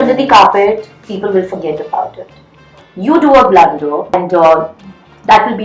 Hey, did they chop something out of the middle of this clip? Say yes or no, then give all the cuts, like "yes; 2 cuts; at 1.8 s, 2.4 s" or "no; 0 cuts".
yes; 1 cut; at 4.1 s